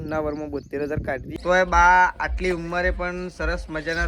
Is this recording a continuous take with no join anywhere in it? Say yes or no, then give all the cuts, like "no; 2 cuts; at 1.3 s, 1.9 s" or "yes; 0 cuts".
no; 1 cut; at 1.3 s